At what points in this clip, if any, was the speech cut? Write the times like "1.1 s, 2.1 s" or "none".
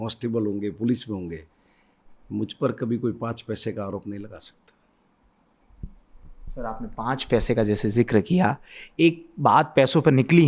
none